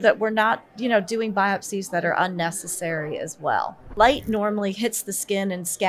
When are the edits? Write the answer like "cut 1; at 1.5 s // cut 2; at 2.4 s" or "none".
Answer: cut 1; at 3.9 s